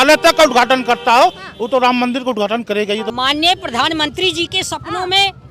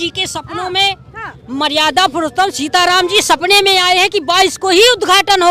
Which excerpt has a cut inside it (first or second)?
first